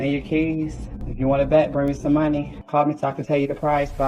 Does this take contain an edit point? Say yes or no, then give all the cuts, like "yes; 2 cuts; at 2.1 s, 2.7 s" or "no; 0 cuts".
no; 0 cuts